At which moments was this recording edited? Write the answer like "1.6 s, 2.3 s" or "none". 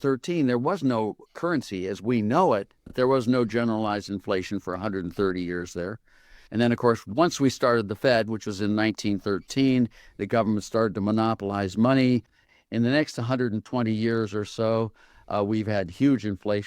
2.9 s, 12.4 s